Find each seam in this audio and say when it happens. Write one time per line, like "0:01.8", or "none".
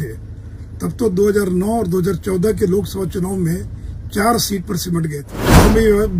0:05.3

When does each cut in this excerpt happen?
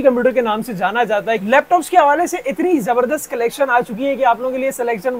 0:01.4

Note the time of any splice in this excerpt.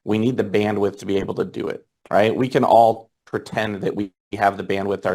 0:01.9

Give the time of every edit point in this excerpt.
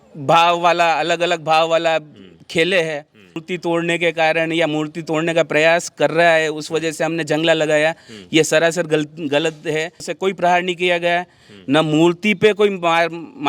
0:03.4
0:10.1

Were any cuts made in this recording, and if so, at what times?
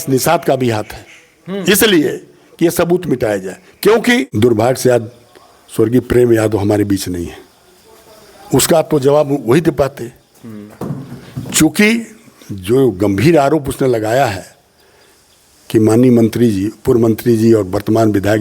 0:04.3

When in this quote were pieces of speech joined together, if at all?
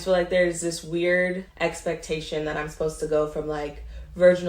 0:01.5

